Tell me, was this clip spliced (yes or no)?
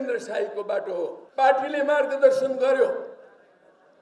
yes